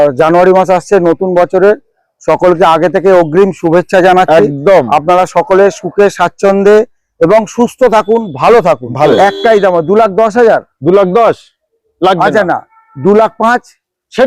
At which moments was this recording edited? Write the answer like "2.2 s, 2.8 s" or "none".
9.1 s